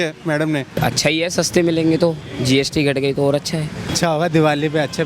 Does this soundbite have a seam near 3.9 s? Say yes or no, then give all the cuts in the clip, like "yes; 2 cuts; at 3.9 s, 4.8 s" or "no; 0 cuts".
yes; 2 cuts; at 0.8 s, 3.9 s